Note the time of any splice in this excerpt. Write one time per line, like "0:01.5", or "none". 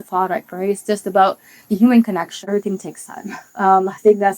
0:02.5